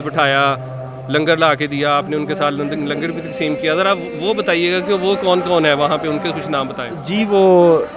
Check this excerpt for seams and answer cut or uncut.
uncut